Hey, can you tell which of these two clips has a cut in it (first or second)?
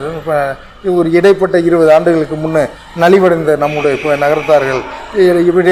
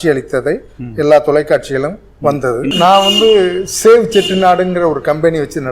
second